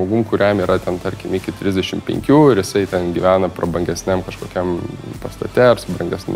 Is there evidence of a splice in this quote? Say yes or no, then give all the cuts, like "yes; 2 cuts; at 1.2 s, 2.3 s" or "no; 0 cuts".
no; 0 cuts